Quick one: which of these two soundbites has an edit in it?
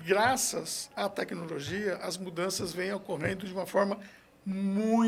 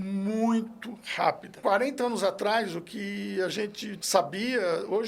second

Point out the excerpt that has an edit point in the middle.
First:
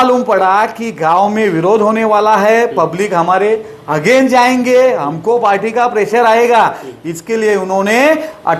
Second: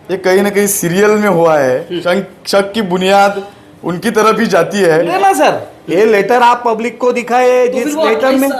second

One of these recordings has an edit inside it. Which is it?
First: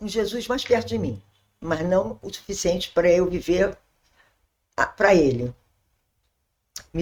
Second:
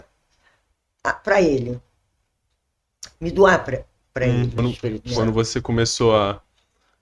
second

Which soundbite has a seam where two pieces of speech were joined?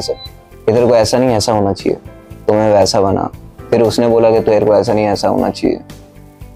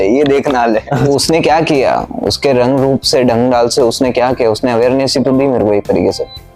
second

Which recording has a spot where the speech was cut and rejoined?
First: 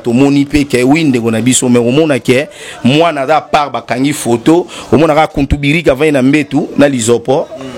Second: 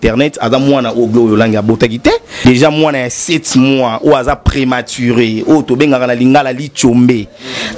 second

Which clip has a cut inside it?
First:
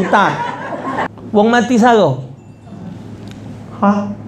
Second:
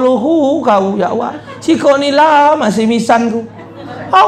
first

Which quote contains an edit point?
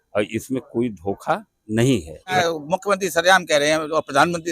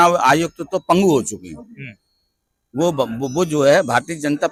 first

